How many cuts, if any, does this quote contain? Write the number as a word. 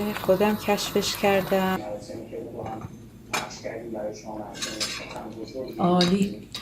one